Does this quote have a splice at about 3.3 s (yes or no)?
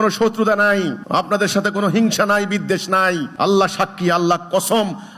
yes